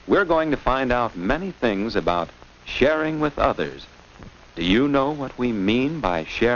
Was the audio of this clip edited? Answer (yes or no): yes